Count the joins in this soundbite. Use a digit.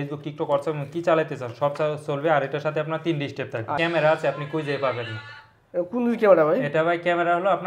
1